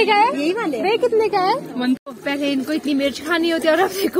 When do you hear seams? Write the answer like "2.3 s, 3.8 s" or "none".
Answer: 2.0 s

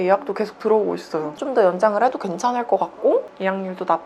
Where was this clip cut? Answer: 1.3 s

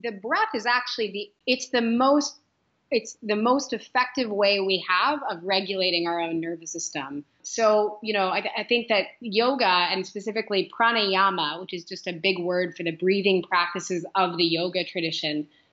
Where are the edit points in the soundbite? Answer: 1.3 s, 7.4 s

